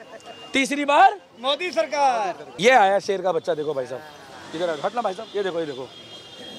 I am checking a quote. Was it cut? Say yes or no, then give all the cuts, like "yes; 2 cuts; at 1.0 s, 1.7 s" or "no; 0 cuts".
yes; 1 cut; at 2.6 s